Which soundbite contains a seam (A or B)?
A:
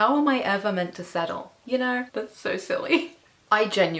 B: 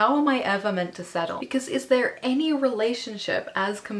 B